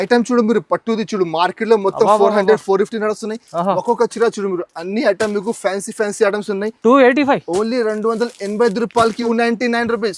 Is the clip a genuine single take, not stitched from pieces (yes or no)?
no